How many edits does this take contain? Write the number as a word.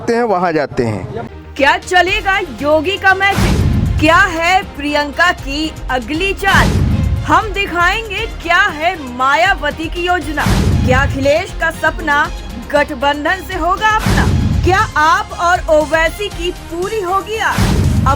one